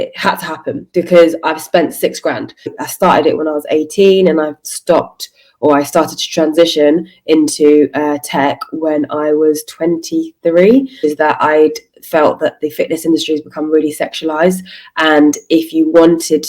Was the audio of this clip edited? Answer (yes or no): yes